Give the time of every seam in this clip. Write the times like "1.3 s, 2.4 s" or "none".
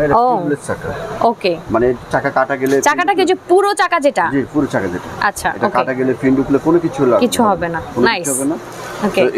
none